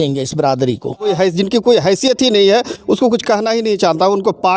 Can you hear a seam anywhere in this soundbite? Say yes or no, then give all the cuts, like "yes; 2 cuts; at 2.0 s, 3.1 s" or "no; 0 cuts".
yes; 1 cut; at 1.1 s